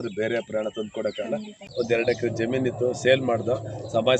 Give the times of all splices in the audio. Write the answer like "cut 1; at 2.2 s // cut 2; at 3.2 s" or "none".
cut 1; at 1.6 s